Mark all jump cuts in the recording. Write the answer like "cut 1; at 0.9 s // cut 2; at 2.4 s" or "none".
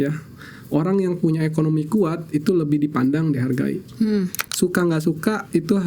cut 1; at 4.4 s